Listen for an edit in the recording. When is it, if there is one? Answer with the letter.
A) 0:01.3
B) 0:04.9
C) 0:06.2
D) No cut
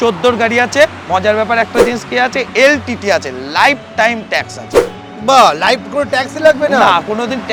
D